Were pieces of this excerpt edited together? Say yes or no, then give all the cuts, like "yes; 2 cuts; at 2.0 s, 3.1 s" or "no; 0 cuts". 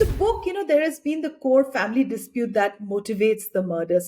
no; 0 cuts